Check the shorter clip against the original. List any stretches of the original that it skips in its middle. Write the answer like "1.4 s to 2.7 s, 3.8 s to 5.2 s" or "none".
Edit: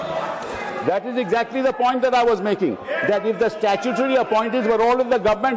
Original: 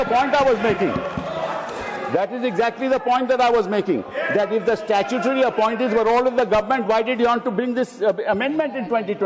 none